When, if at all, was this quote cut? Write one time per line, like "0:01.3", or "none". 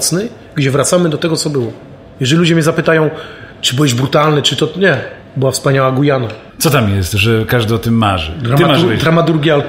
0:06.4